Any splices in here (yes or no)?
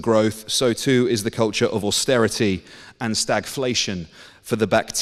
no